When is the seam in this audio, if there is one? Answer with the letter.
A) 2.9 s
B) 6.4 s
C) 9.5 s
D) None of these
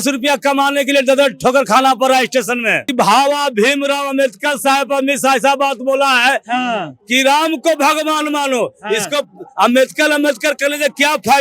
A